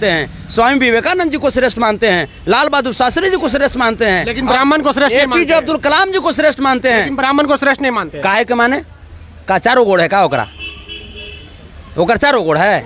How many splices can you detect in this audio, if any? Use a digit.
0